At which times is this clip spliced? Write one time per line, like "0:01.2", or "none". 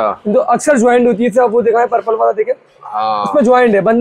none